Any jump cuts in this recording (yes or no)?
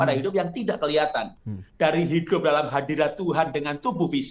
no